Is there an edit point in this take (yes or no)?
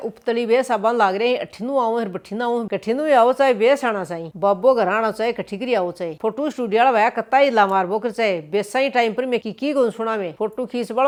no